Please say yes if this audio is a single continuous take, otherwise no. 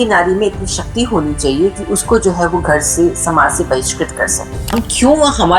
no